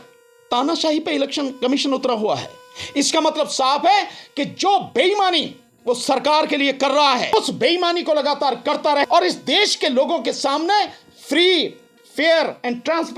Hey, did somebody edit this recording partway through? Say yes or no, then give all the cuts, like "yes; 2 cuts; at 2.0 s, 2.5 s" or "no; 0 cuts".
yes; 2 cuts; at 7.3 s, 9.0 s